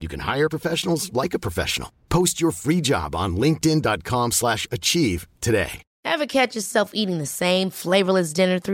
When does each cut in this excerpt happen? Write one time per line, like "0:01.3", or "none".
0:05.8